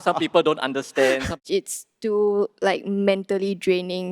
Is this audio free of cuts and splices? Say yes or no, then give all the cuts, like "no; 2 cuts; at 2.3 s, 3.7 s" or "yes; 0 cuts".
no; 1 cut; at 1.4 s